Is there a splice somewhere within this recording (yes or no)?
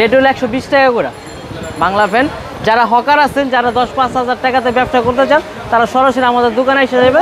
no